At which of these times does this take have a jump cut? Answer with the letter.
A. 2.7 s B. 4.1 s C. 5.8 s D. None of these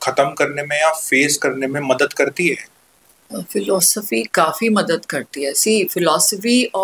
D